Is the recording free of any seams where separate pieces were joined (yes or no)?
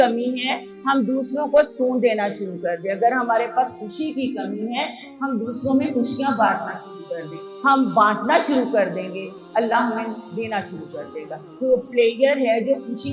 no